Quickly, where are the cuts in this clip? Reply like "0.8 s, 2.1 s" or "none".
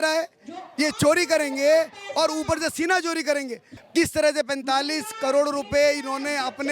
3.7 s